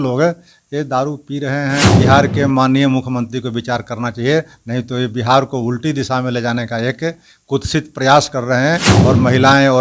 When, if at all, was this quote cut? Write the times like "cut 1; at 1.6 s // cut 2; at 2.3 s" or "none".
cut 1; at 1.9 s // cut 2; at 8.9 s